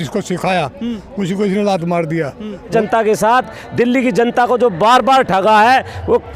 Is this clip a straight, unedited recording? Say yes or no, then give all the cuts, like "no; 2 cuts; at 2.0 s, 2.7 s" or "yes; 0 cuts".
no; 1 cut; at 2.7 s